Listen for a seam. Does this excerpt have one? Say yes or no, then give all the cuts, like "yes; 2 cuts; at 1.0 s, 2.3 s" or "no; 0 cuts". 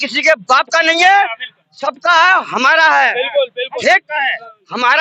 no; 0 cuts